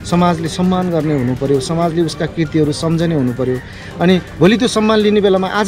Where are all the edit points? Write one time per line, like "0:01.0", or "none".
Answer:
none